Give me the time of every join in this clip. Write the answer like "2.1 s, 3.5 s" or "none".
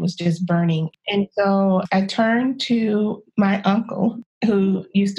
0.9 s, 1.8 s, 3.2 s, 4.3 s

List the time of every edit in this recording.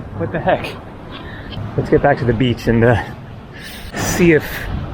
1.5 s, 3.9 s

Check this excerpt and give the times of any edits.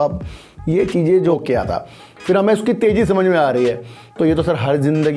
1.2 s

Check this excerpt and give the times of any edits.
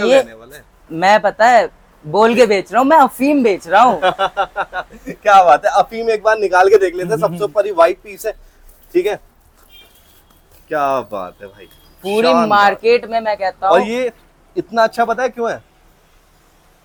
none

